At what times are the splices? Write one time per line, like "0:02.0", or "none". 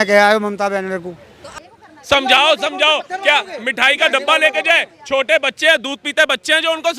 0:01.6

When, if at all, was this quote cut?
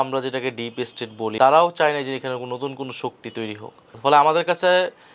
0:01.2
0:03.8

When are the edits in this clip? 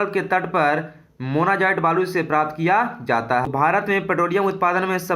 0:03.5

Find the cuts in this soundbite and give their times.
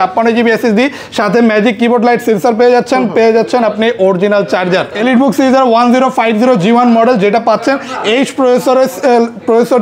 0:04.9

